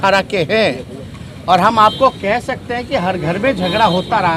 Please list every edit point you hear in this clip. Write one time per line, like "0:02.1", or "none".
none